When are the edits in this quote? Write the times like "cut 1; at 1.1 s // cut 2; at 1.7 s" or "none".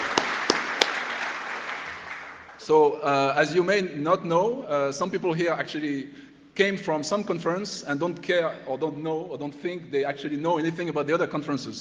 cut 1; at 6.9 s